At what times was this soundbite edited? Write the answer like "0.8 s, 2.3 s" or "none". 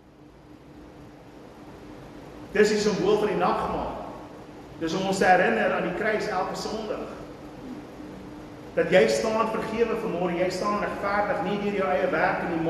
1.2 s